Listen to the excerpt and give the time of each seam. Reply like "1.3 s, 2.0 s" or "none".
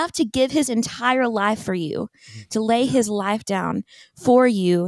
none